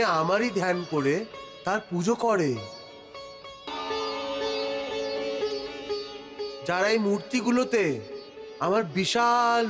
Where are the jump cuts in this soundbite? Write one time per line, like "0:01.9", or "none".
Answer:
0:03.7